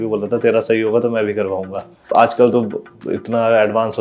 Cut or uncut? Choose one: cut